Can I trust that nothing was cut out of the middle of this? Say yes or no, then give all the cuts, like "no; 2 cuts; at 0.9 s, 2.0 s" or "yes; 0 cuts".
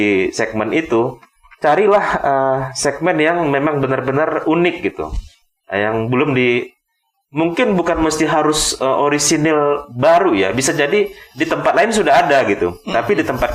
yes; 0 cuts